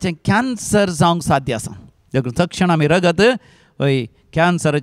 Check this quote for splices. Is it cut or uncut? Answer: uncut